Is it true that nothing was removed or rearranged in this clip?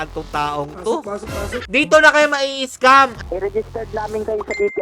no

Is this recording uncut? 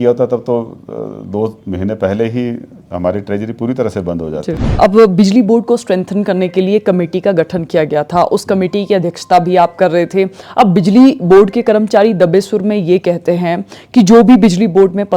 no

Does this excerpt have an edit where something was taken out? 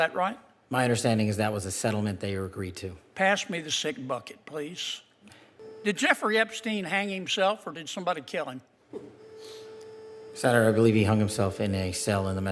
yes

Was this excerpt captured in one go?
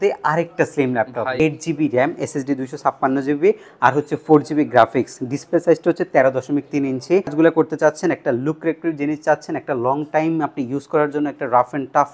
no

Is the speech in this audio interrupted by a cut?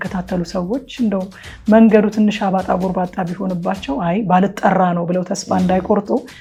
no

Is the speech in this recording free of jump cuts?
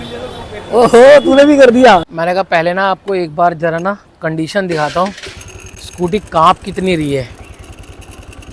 no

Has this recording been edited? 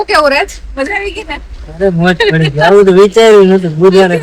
no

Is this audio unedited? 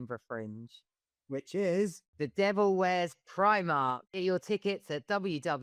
yes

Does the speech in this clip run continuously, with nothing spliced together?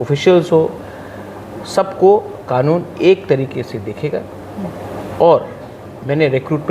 yes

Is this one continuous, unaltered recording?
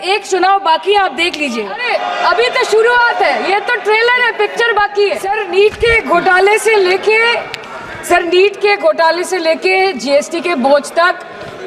no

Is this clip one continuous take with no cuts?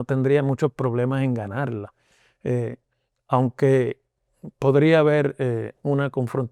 yes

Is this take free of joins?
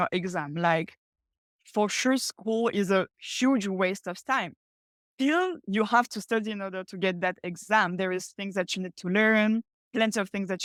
yes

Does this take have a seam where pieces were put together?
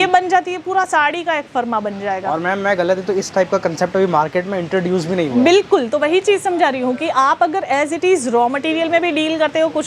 no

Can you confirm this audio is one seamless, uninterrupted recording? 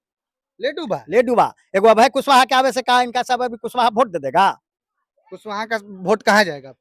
yes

